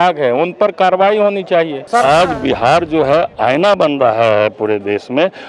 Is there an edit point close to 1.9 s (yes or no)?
yes